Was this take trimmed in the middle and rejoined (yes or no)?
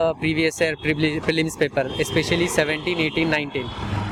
no